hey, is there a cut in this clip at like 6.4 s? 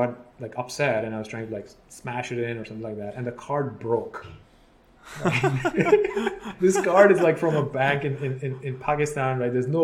yes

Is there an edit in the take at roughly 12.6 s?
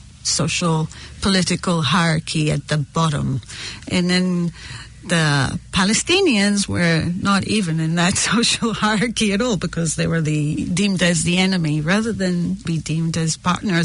yes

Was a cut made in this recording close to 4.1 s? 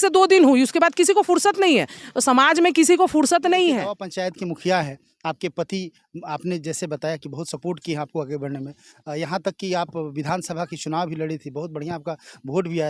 yes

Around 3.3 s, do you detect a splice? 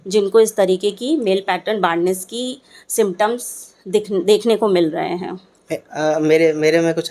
no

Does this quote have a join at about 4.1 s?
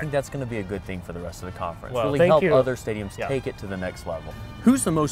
yes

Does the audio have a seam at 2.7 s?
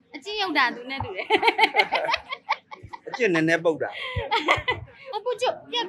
no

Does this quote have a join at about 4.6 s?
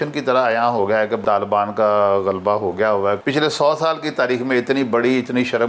no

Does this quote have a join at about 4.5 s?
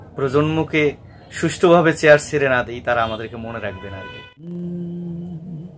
yes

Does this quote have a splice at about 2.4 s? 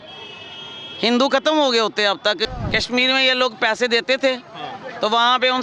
yes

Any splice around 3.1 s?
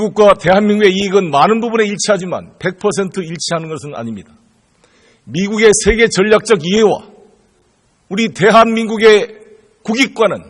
no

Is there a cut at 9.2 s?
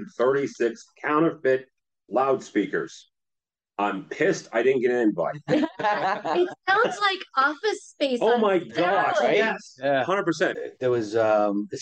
no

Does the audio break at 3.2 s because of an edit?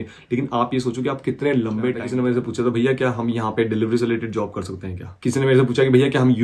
no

